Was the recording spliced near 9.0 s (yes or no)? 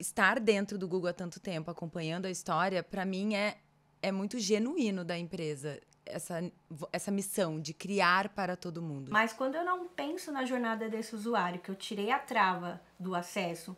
yes